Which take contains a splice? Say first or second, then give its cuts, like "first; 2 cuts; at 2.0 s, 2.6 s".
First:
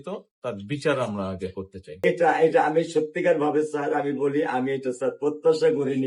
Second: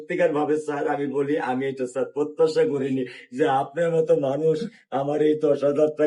first; 1 cut; at 2.0 s